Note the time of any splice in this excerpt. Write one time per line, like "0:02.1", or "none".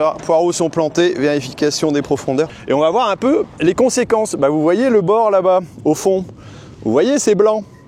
0:02.6